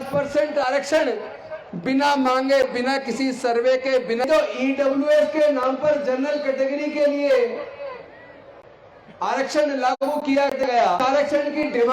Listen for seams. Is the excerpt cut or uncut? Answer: cut